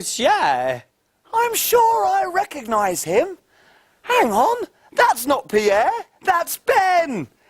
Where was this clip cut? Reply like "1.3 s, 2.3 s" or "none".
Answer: 4.7 s

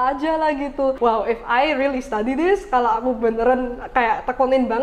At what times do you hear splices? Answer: 1.0 s

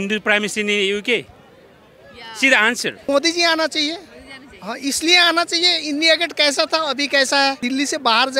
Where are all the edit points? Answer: 3.0 s, 7.6 s

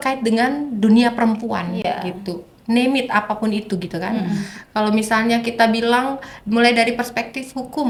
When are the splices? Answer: none

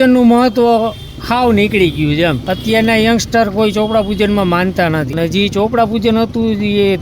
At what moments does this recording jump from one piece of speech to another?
2.4 s, 5.1 s

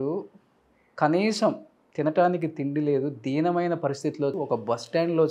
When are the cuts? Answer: 4.3 s

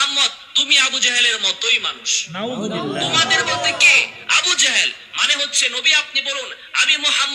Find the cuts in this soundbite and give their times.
none

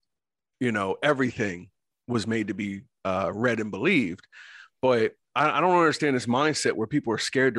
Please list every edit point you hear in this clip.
5.2 s

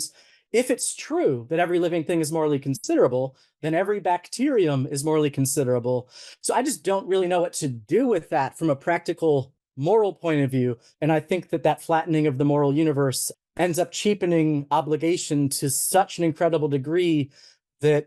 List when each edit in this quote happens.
10.9 s, 13.2 s

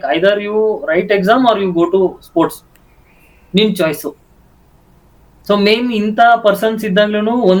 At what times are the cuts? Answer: none

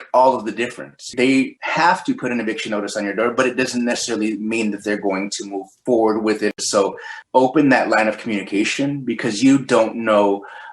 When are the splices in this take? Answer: 6.5 s

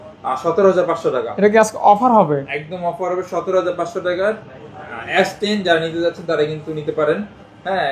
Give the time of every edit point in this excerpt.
none

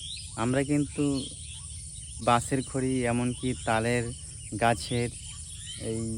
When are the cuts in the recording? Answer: 2.2 s

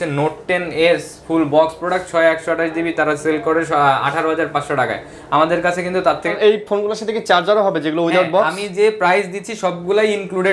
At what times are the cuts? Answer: 6.3 s

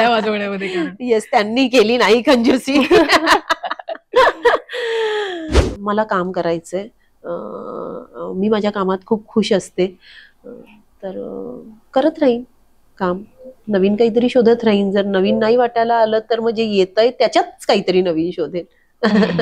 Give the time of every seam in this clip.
5.5 s

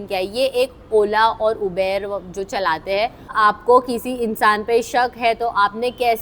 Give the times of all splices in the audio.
3.3 s

